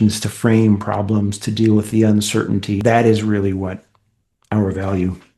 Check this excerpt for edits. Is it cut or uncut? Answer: cut